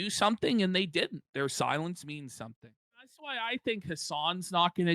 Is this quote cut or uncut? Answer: cut